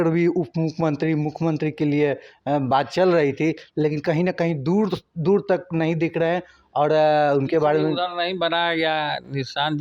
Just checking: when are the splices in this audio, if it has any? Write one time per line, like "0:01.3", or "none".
none

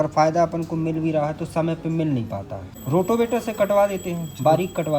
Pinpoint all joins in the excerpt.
0:02.6

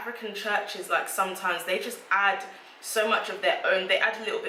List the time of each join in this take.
none

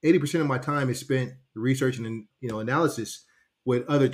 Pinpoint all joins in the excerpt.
0:02.3

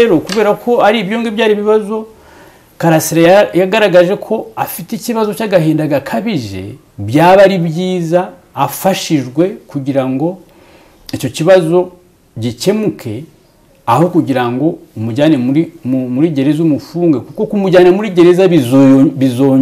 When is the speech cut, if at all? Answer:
none

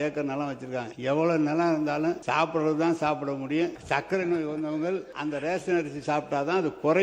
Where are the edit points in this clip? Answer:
0:00.9
0:02.2
0:03.8
0:05.1

